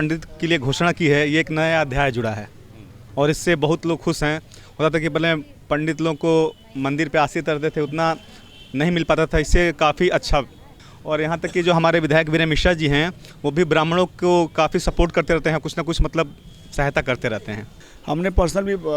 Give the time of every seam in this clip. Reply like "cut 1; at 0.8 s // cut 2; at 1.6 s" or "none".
cut 1; at 10.9 s // cut 2; at 17.7 s